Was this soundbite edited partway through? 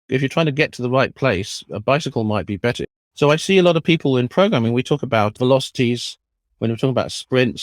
no; 0 cuts

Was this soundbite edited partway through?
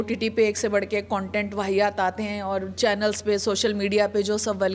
no; 0 cuts

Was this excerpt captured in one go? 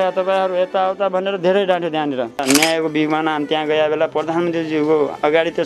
no; 1 cut; at 2.4 s

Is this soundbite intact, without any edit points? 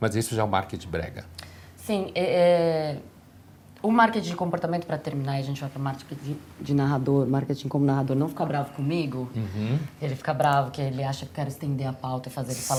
yes; 0 cuts

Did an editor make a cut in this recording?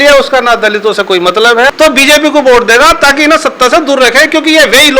yes; 1 cut; at 1.7 s

